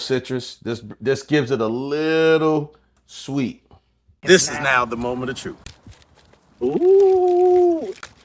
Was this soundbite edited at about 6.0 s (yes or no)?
no